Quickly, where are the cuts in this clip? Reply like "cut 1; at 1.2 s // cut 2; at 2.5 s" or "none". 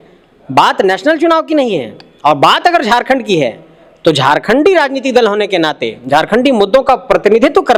none